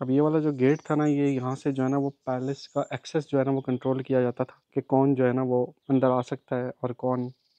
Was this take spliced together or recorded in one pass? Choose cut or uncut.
uncut